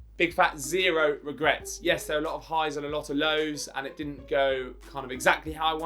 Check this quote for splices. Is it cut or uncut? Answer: cut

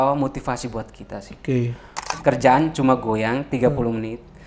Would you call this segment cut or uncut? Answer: cut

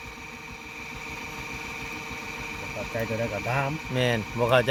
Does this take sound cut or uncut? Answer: uncut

